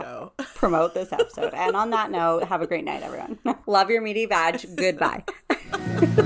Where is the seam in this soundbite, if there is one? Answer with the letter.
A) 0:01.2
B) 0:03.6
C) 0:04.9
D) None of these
B